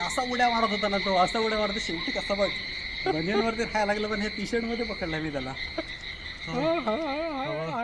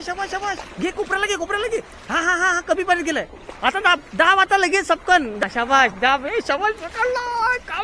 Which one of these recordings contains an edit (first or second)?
second